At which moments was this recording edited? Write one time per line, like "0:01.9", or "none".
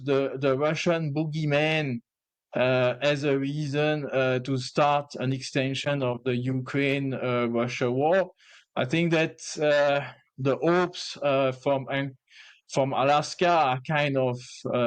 none